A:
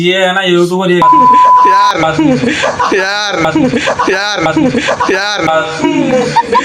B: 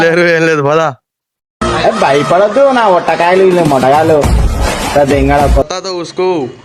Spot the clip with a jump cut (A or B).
B